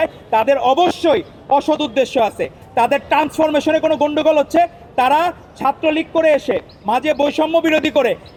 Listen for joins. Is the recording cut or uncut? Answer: uncut